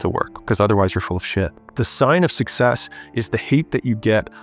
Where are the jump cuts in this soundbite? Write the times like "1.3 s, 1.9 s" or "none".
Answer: 1.7 s